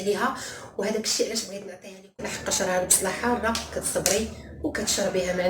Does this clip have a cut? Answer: yes; 1 cut; at 2.2 s

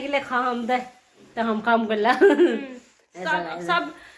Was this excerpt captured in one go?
yes; 0 cuts

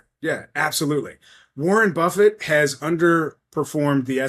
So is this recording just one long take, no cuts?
yes; 0 cuts

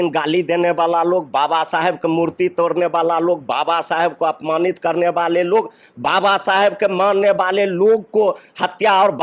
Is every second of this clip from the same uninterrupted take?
yes; 0 cuts

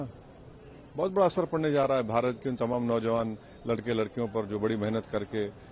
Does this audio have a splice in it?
no; 0 cuts

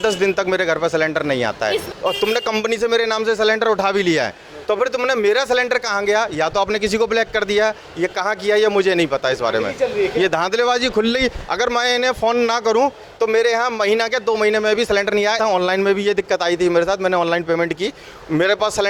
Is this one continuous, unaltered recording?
no; 2 cuts; at 1.9 s, 15.4 s

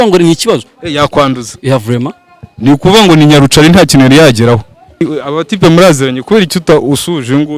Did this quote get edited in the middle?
yes; 1 cut; at 5.0 s

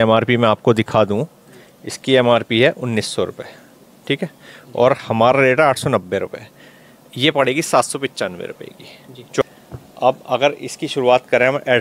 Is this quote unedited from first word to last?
no; 1 cut; at 9.4 s

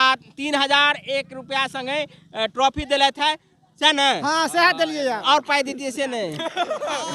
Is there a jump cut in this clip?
no; 0 cuts

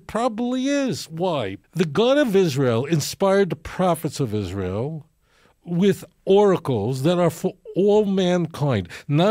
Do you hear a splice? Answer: yes; 1 cut; at 1.6 s

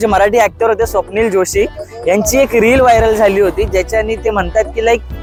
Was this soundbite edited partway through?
no; 0 cuts

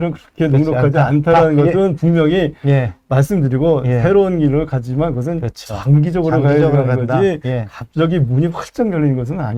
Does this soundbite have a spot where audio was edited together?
no; 0 cuts

